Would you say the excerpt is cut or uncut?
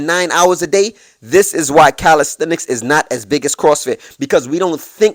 uncut